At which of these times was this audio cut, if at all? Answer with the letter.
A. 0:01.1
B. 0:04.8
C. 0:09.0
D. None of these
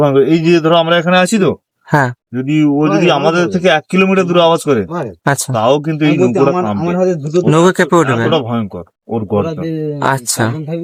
D